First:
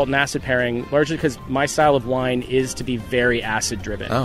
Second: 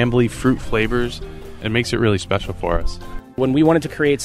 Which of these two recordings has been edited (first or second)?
second